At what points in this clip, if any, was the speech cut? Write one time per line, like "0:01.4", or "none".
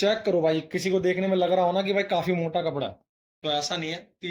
none